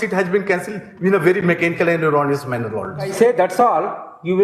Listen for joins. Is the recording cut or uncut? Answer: cut